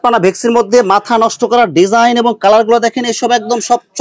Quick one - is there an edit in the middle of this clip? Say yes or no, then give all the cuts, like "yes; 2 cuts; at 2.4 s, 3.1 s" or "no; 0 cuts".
no; 0 cuts